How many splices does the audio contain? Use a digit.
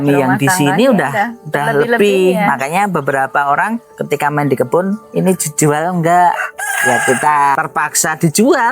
1